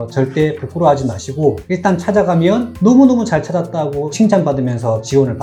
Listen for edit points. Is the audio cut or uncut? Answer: uncut